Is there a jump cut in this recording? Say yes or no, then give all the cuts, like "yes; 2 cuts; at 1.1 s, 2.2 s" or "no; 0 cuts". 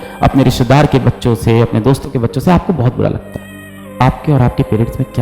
yes; 1 cut; at 3.9 s